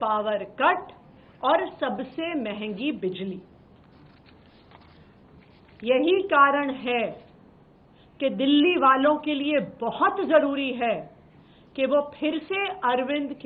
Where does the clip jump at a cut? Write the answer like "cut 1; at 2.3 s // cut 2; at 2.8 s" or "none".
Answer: none